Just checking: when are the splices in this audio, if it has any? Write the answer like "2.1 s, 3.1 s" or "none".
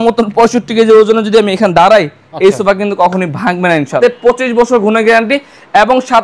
3.9 s